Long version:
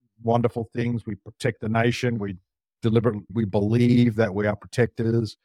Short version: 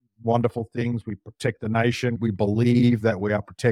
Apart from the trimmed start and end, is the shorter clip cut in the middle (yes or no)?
yes